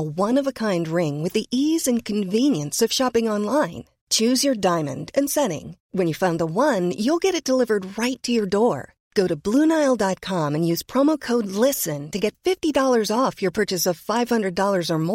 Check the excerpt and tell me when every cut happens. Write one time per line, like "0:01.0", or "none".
none